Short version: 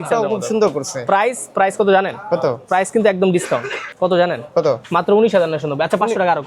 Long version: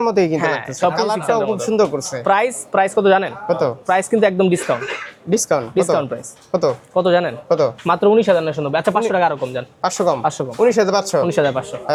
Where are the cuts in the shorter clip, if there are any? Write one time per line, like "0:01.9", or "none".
0:03.9